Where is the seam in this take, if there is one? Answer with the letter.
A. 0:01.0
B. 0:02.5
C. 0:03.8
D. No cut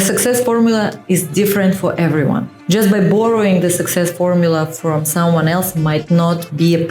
B